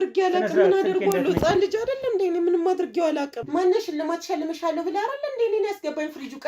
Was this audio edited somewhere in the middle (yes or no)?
yes